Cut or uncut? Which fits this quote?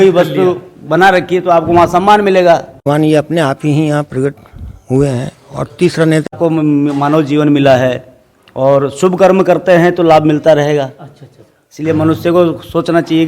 cut